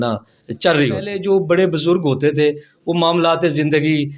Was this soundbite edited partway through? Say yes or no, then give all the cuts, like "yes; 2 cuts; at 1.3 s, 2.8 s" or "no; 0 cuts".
yes; 1 cut; at 1.1 s